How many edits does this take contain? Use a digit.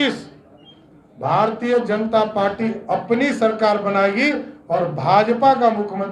0